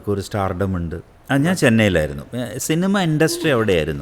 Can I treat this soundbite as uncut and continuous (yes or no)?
no